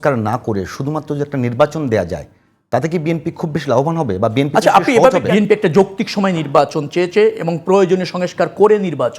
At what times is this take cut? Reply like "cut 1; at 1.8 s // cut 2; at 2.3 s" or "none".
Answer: cut 1; at 5.3 s